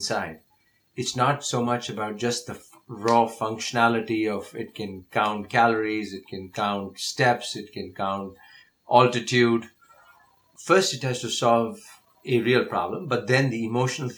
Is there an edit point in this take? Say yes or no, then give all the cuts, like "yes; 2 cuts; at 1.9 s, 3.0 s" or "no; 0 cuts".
yes; 1 cut; at 10.5 s